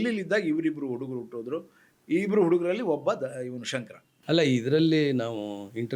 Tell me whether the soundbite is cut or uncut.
cut